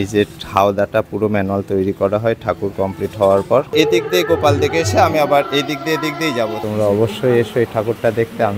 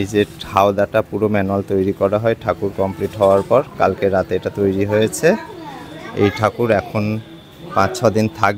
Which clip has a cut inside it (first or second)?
first